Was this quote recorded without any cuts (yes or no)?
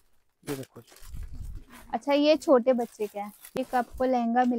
no